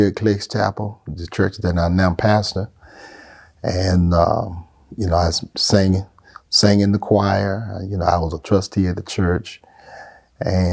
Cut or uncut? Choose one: uncut